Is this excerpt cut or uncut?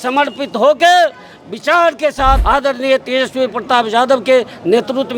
cut